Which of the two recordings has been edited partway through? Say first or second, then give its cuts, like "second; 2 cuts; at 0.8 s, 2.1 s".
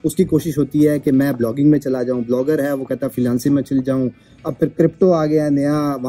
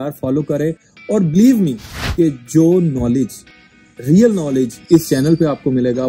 second; 1 cut; at 1.9 s